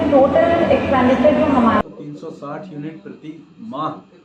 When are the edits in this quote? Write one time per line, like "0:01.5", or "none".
0:01.8